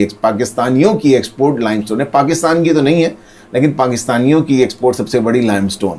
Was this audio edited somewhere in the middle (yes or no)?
no